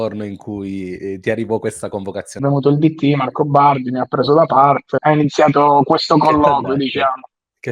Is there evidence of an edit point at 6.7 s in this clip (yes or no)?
no